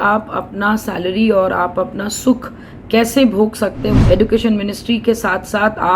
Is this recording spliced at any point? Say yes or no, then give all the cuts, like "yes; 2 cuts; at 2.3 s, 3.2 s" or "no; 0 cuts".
yes; 1 cut; at 4.0 s